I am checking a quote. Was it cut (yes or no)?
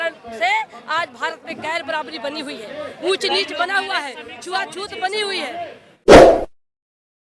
yes